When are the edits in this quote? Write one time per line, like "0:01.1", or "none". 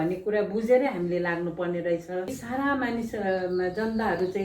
0:02.4